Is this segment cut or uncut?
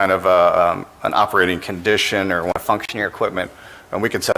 uncut